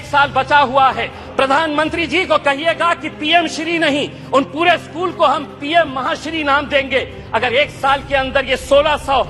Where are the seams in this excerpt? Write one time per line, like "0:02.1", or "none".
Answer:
0:01.2